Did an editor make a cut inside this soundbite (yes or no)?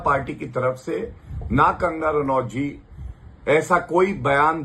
no